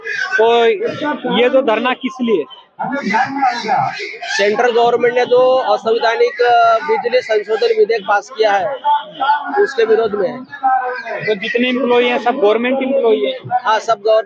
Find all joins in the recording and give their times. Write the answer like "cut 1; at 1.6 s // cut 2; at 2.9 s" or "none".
none